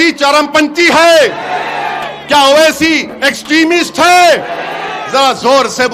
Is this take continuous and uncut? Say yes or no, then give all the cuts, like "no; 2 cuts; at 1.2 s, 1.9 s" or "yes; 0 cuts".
yes; 0 cuts